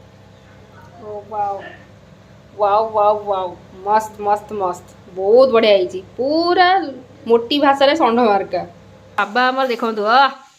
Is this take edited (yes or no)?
yes